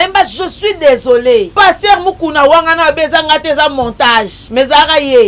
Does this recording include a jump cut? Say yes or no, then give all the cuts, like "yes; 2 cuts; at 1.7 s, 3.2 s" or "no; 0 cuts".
yes; 2 cuts; at 1.5 s, 4.4 s